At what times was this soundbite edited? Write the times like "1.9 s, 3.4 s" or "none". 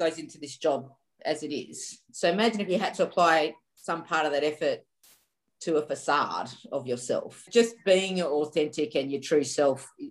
none